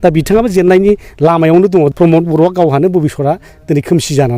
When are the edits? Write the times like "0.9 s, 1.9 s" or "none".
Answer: 1.9 s